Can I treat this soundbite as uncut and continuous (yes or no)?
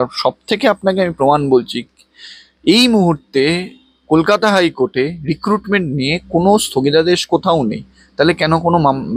yes